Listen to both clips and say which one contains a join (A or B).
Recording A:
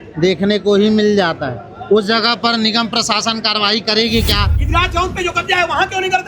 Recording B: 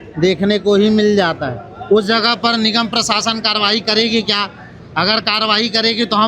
A